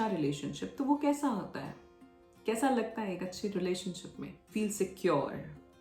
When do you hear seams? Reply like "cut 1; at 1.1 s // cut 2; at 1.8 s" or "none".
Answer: cut 1; at 4.4 s